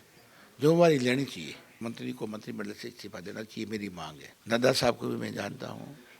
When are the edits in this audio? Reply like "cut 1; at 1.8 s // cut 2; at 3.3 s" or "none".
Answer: cut 1; at 1.8 s // cut 2; at 4.2 s